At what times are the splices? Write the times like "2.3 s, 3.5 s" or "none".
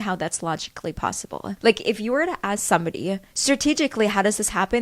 1.6 s